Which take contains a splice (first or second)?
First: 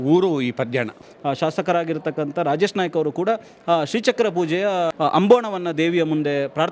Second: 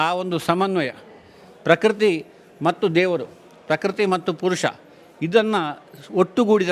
first